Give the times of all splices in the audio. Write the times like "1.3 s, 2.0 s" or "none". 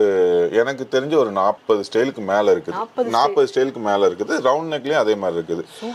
none